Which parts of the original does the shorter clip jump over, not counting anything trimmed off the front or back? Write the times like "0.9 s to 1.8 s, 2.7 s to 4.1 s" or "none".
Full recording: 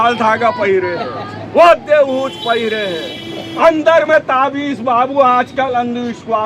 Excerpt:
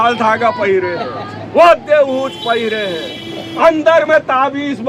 none